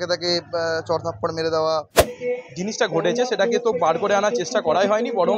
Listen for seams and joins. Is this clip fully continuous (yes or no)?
no